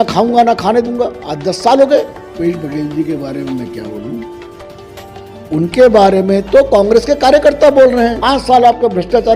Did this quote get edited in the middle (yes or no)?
yes